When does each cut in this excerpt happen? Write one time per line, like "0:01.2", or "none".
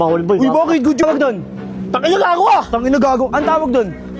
0:01.0